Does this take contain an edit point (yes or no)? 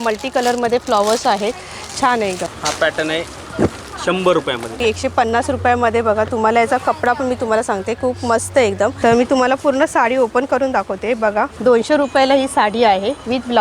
yes